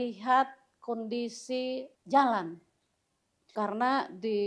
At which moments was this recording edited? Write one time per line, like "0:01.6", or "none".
0:01.9
0:03.5